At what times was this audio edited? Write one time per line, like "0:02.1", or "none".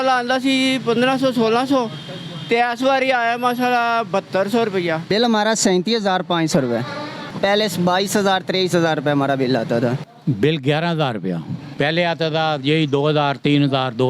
0:05.0
0:07.2
0:10.1
0:11.6